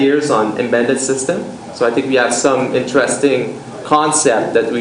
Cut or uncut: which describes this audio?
cut